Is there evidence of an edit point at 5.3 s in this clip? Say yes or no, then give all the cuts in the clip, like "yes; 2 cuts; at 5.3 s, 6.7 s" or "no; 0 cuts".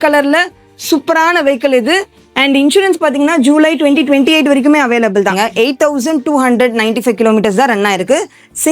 yes; 1 cut; at 5.3 s